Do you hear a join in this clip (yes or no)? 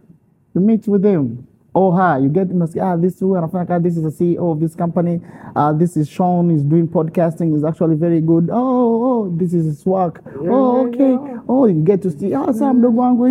no